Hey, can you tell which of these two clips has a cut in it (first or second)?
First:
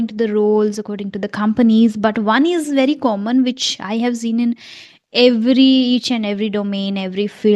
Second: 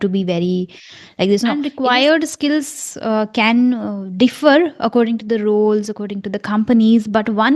second